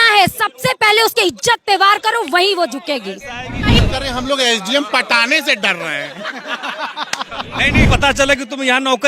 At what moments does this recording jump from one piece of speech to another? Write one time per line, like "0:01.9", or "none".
0:03.8
0:07.9